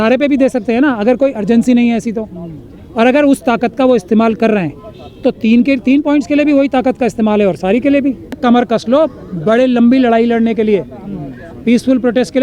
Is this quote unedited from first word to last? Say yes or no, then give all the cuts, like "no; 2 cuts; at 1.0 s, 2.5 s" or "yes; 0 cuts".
no; 1 cut; at 8.4 s